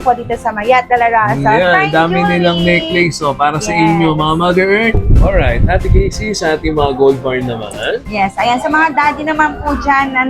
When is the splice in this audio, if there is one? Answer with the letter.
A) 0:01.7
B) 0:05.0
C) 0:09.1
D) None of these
B